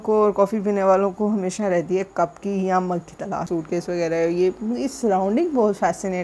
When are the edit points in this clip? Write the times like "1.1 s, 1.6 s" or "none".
3.4 s

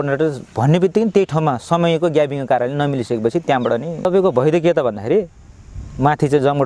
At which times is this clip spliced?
4.1 s

